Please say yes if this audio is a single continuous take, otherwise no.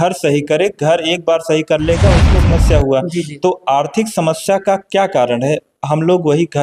no